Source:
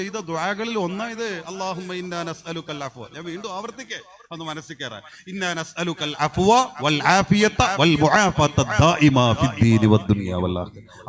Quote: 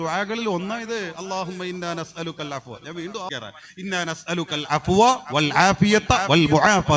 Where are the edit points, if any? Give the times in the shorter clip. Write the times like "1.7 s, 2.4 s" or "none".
3.3 s